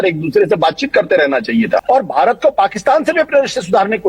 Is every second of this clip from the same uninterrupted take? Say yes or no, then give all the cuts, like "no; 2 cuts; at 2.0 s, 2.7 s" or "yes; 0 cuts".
no; 1 cut; at 1.8 s